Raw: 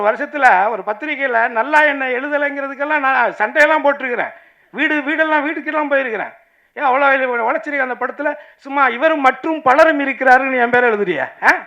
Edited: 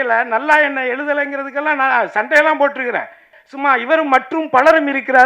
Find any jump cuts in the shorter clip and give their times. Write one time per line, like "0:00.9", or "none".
0:03.4